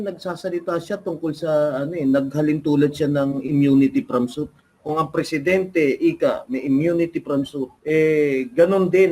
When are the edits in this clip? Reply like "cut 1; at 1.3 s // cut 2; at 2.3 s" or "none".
cut 1; at 7.7 s